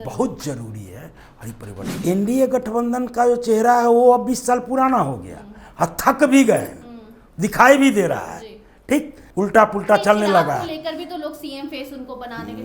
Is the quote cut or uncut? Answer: cut